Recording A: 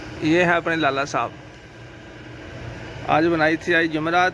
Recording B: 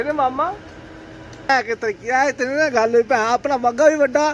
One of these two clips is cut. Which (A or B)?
B